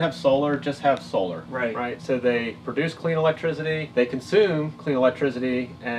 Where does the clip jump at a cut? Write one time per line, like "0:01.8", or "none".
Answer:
0:01.4
0:03.8